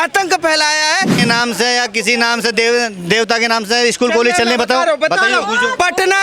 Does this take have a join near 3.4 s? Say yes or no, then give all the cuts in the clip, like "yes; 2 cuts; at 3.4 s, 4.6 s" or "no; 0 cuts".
no; 1 cut; at 1.1 s